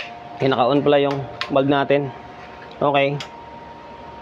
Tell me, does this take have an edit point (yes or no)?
no